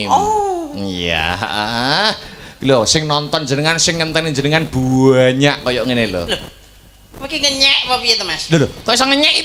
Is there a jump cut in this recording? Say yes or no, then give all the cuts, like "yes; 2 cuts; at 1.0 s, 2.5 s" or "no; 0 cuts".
no; 0 cuts